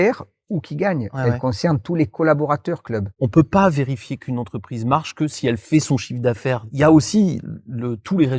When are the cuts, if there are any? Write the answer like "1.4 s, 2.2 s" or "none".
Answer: 3.2 s, 6.7 s

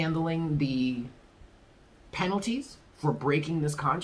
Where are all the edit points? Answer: none

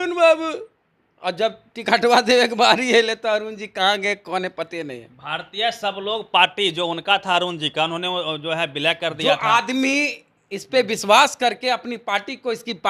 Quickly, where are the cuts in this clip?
none

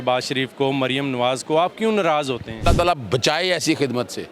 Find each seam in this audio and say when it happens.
2.7 s

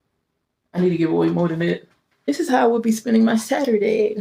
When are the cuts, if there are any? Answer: 2.3 s

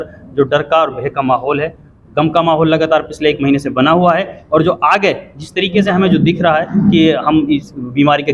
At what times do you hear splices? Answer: none

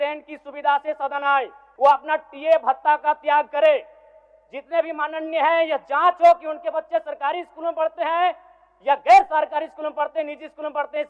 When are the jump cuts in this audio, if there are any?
1.6 s

